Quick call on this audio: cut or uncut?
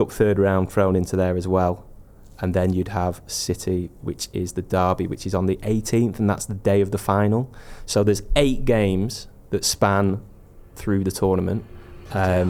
uncut